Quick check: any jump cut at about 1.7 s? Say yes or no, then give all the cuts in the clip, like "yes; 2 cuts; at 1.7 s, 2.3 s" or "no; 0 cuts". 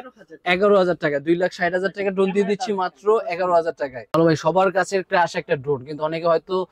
no; 1 cut; at 4.1 s